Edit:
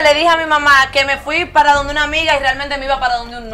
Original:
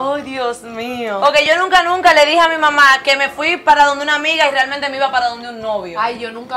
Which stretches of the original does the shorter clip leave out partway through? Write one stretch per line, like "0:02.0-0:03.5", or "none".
none